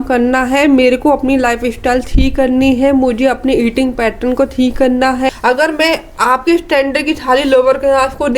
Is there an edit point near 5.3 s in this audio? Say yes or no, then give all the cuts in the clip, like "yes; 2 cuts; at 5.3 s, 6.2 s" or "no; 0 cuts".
yes; 1 cut; at 5.3 s